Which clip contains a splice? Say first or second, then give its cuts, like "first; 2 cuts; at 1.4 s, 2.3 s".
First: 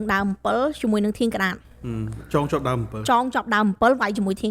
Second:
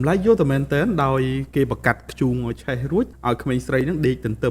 second; 1 cut; at 3.2 s